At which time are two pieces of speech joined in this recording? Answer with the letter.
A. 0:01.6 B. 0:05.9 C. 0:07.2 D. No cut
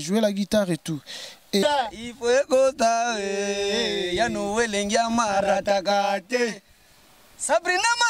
A